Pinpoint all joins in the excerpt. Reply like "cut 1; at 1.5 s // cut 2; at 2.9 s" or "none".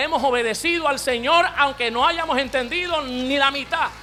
none